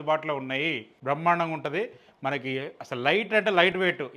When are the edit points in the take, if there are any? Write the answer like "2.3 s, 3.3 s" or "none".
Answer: 0.9 s